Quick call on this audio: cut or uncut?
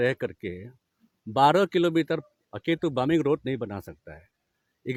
uncut